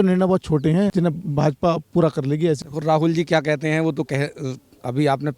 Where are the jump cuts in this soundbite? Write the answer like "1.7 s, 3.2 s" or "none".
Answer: 0.9 s, 2.6 s